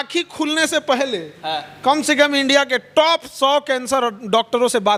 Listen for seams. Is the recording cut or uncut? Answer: uncut